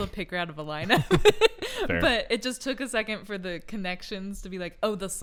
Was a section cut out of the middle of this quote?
no; 0 cuts

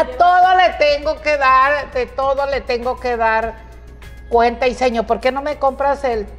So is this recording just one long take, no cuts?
yes; 0 cuts

